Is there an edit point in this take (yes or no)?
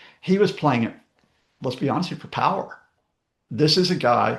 no